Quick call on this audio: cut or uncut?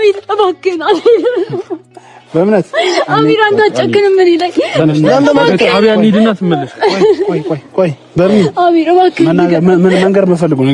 uncut